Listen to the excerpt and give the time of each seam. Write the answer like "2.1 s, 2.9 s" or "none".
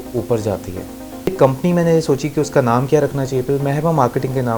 1.3 s